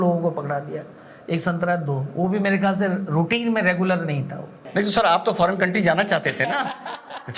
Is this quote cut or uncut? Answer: cut